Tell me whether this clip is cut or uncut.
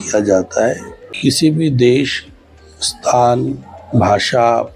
cut